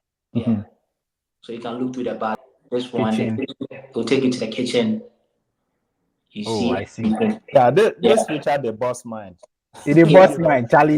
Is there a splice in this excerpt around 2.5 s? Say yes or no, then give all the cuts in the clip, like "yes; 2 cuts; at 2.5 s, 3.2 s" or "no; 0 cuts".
yes; 1 cut; at 2.5 s